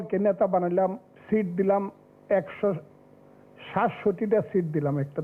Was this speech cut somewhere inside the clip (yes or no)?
yes